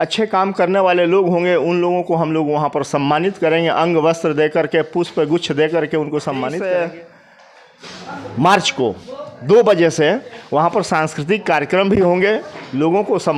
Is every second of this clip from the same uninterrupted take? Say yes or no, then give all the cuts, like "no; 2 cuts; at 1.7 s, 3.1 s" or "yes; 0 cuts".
no; 1 cut; at 6.5 s